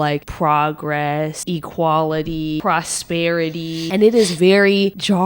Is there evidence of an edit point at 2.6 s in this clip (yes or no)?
yes